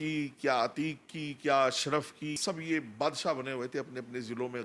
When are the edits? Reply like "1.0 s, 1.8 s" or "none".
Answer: 2.4 s